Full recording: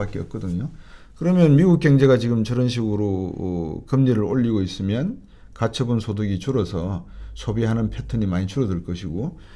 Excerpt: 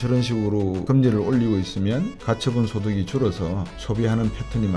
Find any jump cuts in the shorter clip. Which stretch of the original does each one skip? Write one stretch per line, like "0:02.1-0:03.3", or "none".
0:03.3-0:03.8
0:05.2-0:05.5
0:07.1-0:07.3